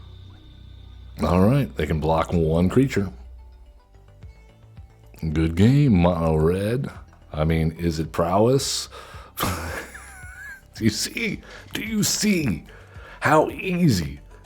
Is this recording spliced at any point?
yes; 1 cut; at 3.9 s

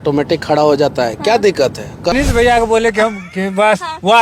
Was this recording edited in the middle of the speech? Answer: yes; 1 cut; at 2.1 s

